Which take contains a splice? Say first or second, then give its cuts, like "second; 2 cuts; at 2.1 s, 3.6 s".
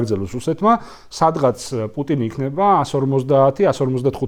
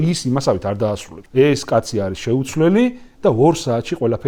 second; 1 cut; at 1.1 s